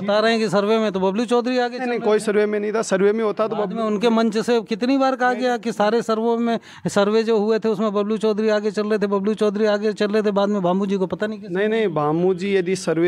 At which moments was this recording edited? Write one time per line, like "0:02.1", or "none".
none